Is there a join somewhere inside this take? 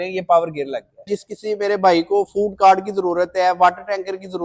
yes; 1 cut; at 1.1 s

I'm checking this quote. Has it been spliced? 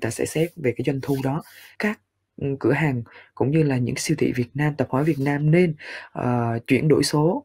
yes; 1 cut; at 1.7 s

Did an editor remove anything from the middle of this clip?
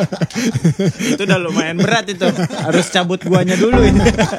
no; 0 cuts

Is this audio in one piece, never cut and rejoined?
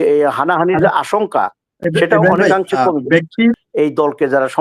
no; 1 cut; at 3.6 s

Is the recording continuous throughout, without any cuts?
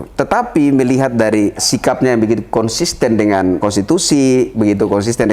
no; 3 cuts; at 1.7 s, 3.6 s, 4.5 s

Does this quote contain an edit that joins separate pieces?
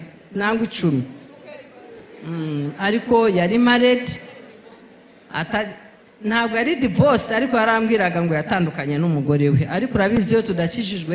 no; 0 cuts

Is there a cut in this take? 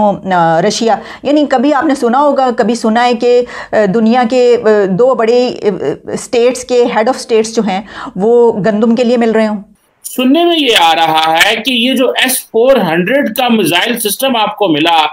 no; 0 cuts

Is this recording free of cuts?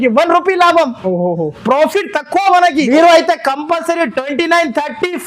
no; 1 cut; at 2.9 s

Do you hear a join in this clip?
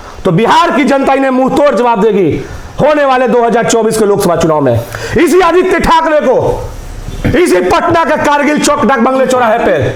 no; 0 cuts

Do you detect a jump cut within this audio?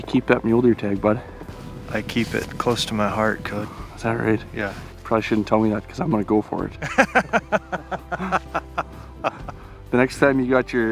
no; 0 cuts

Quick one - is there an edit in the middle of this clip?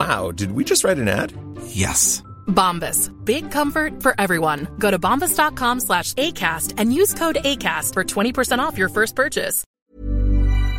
yes; 1 cut; at 9.7 s

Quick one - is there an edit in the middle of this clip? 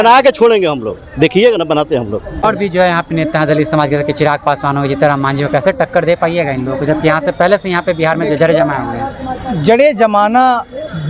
yes; 1 cut; at 2.3 s

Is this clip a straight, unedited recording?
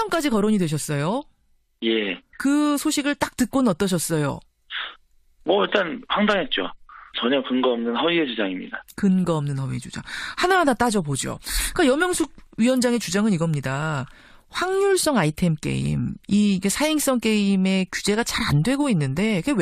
no; 1 cut; at 9.4 s

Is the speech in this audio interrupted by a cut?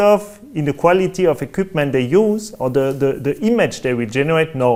no; 0 cuts

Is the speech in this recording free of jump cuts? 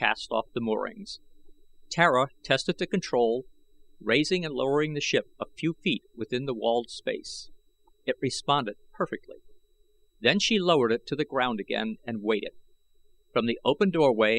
yes; 0 cuts

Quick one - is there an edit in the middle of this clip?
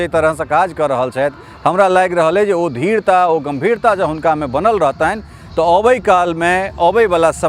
no; 0 cuts

